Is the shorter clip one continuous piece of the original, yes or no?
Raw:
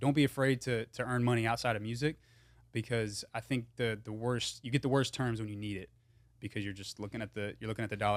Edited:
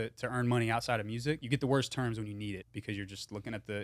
no